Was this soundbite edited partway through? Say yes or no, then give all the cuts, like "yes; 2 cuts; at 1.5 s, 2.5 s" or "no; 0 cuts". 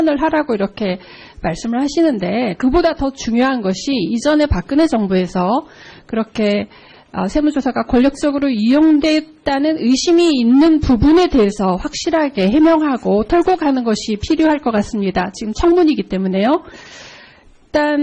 no; 0 cuts